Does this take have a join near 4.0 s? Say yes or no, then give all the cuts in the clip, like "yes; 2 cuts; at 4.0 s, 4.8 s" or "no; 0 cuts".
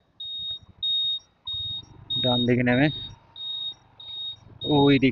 no; 0 cuts